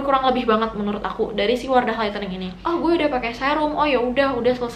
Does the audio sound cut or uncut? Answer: cut